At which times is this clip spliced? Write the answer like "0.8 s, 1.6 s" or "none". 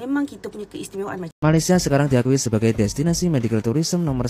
1.3 s